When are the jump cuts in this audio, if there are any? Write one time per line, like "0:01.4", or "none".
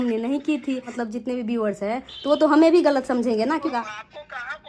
0:01.0
0:03.7